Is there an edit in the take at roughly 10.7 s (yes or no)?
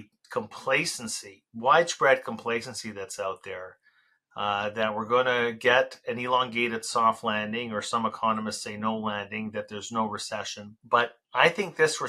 yes